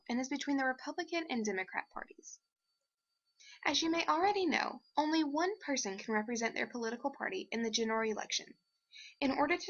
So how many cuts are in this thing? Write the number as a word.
one